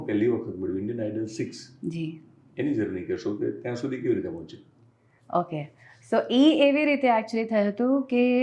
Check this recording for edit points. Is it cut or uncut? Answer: uncut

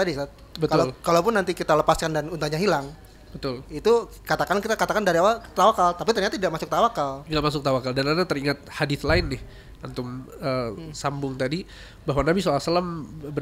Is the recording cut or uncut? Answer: uncut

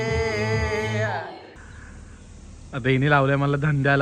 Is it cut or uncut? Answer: cut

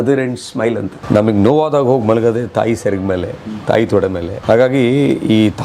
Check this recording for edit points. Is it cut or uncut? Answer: cut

